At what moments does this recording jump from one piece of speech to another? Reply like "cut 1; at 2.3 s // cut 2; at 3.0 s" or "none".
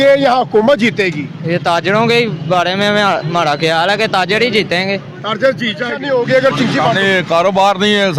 cut 1; at 6.0 s